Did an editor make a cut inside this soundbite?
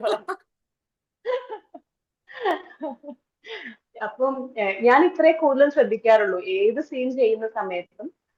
no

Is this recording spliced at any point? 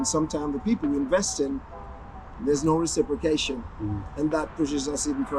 no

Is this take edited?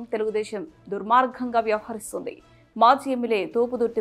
no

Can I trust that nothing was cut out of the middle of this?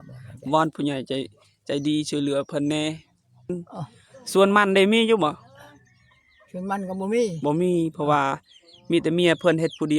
no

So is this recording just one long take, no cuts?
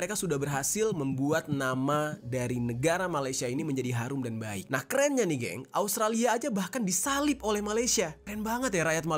no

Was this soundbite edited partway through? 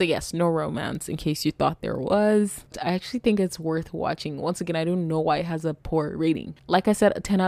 yes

